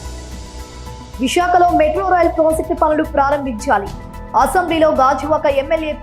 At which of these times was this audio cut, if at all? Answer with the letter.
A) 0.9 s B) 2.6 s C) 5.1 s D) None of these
A